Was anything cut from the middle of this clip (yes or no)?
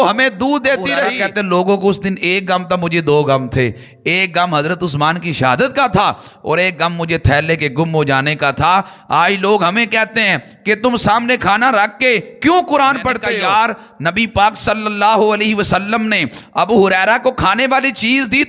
yes